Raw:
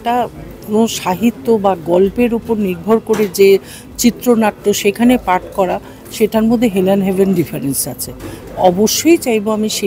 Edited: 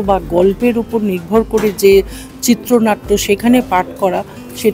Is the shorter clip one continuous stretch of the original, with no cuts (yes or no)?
yes